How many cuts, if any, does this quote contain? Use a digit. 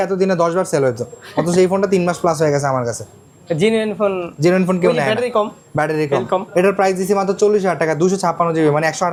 0